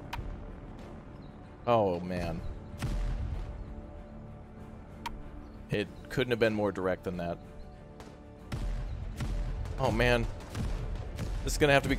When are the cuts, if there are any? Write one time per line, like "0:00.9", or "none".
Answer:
0:08.5